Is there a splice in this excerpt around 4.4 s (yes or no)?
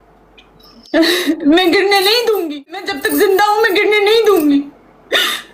no